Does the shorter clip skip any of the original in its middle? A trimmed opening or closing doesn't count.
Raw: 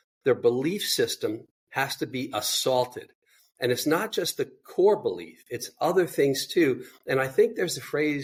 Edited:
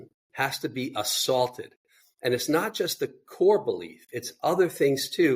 no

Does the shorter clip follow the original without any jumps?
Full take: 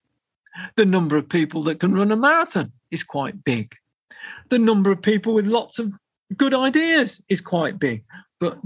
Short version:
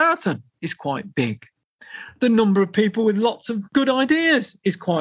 no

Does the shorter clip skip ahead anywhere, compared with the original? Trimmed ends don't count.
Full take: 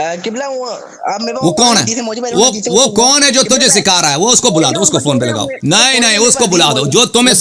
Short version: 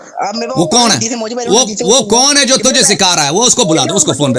no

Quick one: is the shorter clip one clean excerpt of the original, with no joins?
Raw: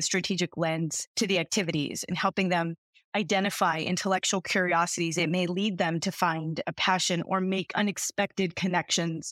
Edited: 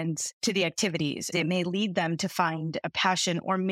no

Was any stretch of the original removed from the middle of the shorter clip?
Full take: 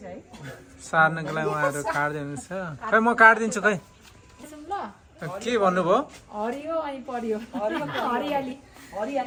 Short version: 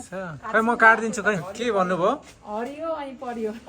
yes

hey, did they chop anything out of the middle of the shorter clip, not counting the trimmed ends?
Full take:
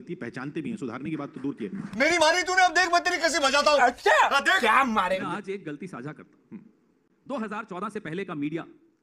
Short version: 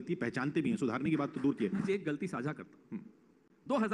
yes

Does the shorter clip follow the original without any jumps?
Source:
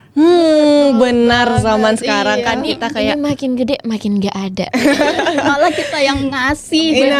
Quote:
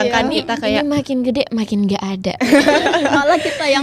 yes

